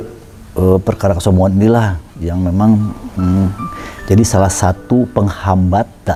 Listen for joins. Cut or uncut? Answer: uncut